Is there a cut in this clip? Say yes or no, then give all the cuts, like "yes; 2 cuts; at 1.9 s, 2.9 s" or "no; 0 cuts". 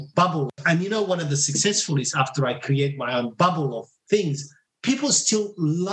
yes; 1 cut; at 3.9 s